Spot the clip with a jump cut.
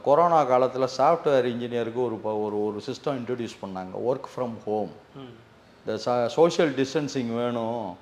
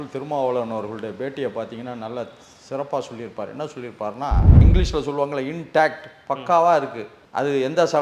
second; 1 cut; at 4.5 s

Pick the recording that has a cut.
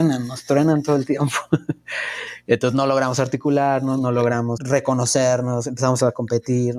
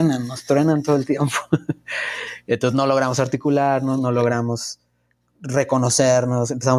first; 1 cut; at 4.6 s

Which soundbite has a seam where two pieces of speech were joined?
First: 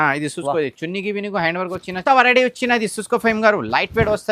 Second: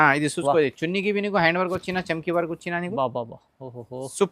first; 1 cut; at 2.0 s

